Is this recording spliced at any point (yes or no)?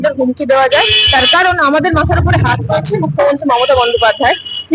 no